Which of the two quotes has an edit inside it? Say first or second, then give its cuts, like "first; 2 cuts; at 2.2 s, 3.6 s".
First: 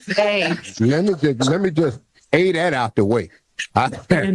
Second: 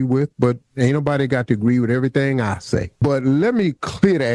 second; 1 cut; at 2.9 s